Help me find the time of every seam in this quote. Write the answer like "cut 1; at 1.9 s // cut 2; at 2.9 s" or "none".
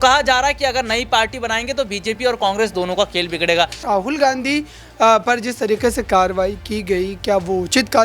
cut 1; at 3.8 s